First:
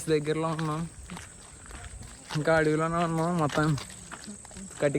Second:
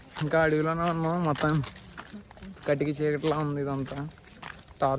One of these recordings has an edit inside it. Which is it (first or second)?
first